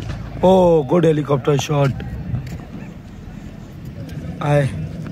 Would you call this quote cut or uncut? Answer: cut